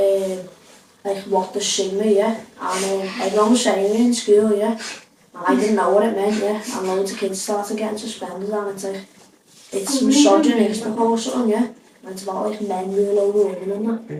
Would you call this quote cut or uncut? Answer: uncut